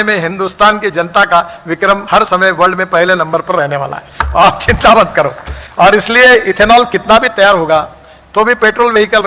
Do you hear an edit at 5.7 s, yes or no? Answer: no